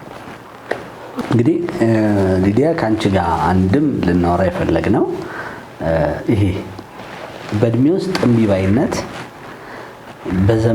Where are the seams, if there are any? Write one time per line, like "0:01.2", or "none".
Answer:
0:01.2